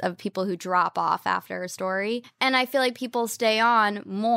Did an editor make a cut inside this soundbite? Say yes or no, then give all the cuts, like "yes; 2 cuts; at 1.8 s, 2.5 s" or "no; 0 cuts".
yes; 1 cut; at 2.3 s